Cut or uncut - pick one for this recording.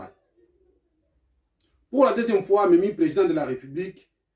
uncut